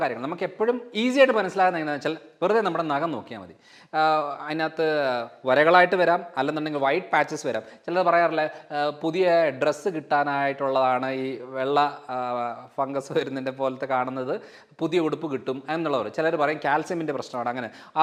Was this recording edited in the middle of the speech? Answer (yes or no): no